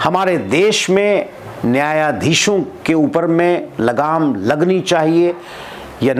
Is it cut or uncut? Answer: uncut